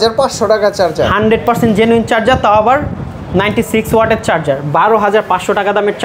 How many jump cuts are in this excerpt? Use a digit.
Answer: 0